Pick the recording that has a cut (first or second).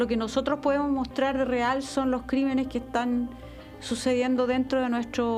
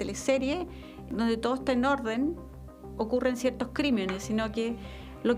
second